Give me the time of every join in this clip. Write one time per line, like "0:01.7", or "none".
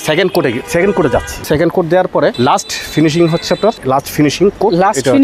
0:01.4
0:02.3
0:03.8

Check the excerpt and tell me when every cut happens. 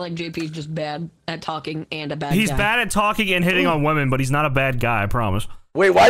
0:01.1

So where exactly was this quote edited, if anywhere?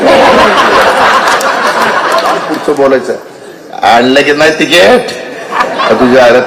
0:02.5

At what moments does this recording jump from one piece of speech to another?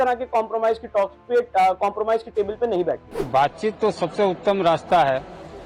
0:03.2

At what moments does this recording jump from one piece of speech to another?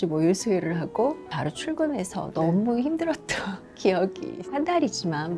0:01.3
0:04.5

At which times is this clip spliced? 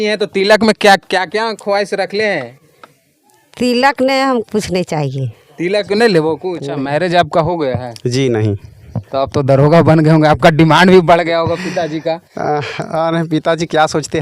0:06.6

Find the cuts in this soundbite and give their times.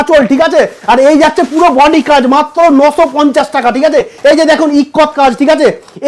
0:04.1

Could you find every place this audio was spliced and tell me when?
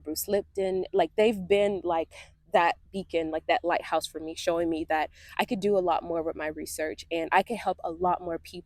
none

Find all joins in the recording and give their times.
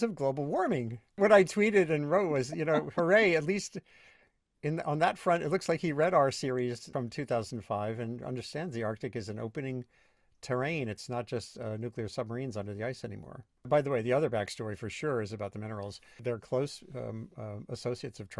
0:01.2
0:06.9
0:13.7
0:16.2

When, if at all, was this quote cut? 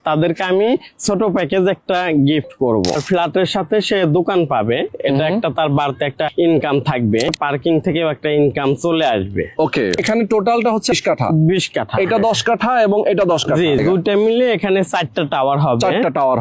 0:03.0
0:06.3
0:07.3
0:10.0
0:10.9
0:13.8

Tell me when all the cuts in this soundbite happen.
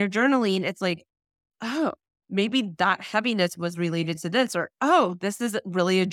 0:02.1

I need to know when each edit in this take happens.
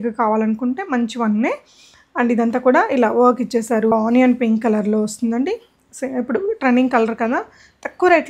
0:03.9

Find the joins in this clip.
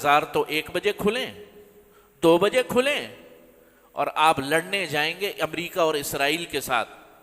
none

